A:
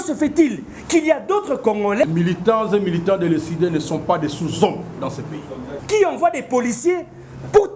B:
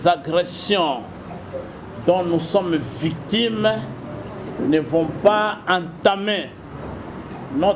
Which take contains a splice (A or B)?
A